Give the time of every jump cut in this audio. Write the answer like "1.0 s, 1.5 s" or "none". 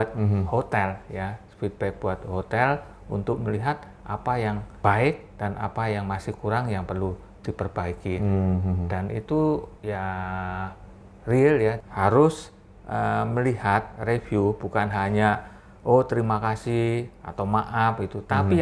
4.8 s, 11.8 s